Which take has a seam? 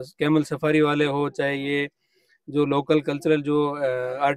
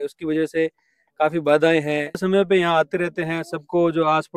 second; 1 cut; at 2.2 s

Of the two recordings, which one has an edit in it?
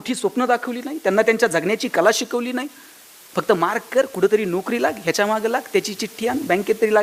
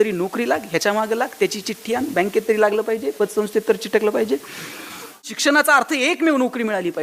second; 1 cut; at 5.3 s

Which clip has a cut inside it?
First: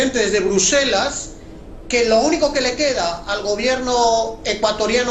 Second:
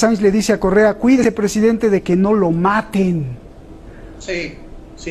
second; 1 cut; at 1.2 s

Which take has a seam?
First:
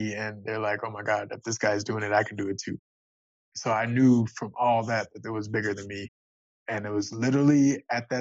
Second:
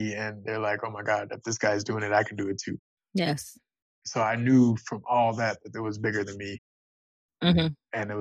first; 2 cuts; at 3.0 s, 6.6 s

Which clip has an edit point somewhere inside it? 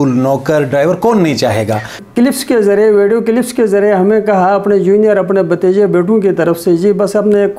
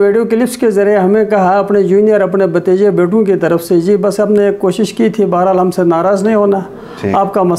first; 1 cut; at 1.9 s

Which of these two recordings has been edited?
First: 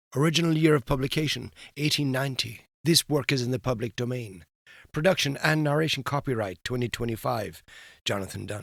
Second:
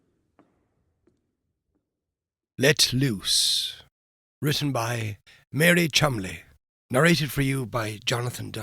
second; 1 cut; at 2.4 s

